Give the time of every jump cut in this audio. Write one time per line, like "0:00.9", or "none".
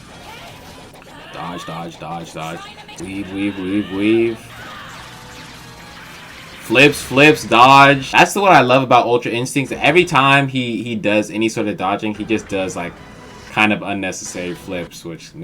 0:00.9
0:02.8
0:08.1